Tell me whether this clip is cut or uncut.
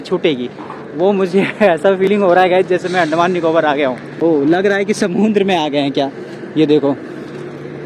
uncut